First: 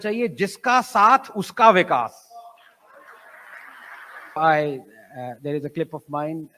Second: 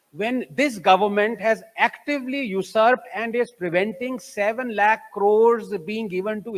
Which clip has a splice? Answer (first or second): first